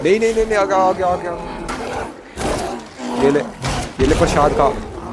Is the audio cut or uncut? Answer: cut